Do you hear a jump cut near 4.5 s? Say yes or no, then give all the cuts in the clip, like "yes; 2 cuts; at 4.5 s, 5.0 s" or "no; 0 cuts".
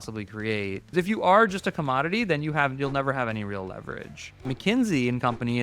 yes; 2 cuts; at 0.9 s, 4.5 s